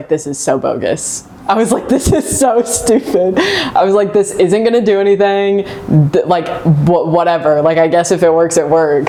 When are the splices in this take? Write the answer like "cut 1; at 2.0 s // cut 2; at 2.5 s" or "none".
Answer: none